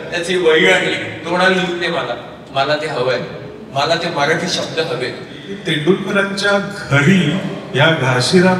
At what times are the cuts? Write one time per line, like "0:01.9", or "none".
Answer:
0:05.5